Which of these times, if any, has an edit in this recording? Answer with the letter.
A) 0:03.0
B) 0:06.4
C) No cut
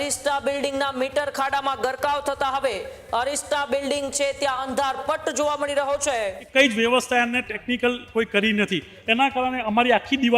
B